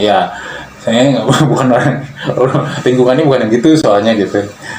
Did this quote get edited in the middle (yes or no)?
no